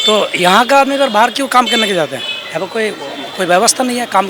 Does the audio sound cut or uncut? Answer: uncut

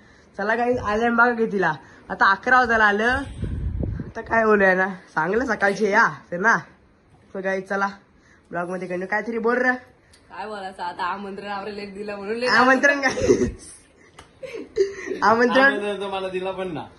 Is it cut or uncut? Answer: uncut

